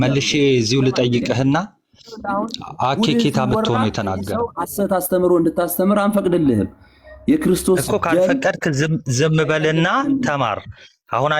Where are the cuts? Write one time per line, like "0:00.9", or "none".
0:04.4